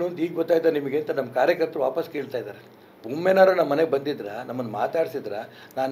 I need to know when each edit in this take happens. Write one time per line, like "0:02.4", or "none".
none